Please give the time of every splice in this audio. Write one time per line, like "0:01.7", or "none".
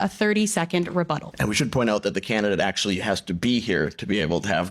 0:01.3